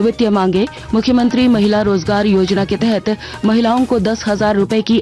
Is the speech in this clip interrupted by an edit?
no; 0 cuts

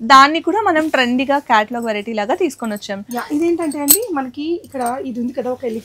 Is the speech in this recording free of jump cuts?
yes; 0 cuts

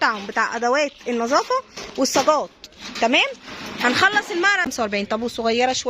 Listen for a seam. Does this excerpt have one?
yes; 1 cut; at 4.7 s

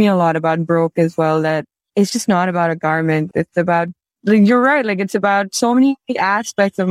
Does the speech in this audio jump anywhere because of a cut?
no; 0 cuts

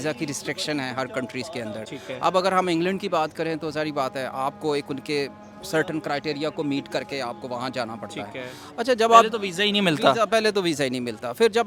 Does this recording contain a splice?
no; 0 cuts

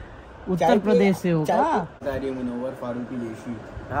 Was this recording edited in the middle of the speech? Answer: yes; 1 cut; at 2.0 s

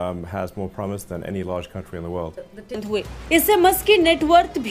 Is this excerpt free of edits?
no; 1 cut; at 2.8 s

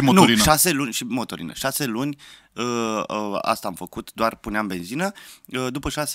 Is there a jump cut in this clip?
no; 0 cuts

